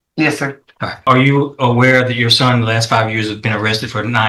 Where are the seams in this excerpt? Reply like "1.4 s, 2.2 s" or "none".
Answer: 1.0 s